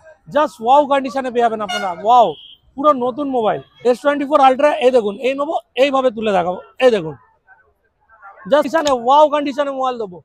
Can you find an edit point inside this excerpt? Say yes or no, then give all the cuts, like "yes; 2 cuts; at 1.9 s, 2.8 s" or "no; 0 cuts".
yes; 2 cuts; at 3.7 s, 8.7 s